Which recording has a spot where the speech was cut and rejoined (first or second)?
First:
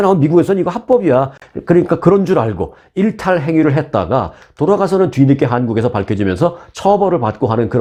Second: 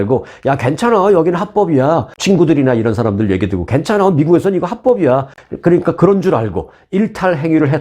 second